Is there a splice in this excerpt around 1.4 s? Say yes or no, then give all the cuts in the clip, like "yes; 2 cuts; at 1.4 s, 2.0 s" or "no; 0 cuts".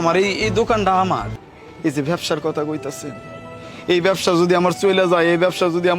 yes; 1 cut; at 1.4 s